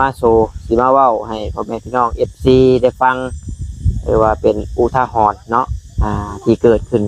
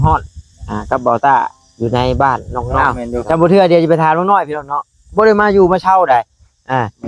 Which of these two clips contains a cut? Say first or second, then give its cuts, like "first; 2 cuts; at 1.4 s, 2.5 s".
second; 1 cut; at 2.8 s